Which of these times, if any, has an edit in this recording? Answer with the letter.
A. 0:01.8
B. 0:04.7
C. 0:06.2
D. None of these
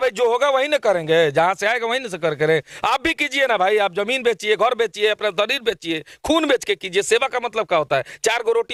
D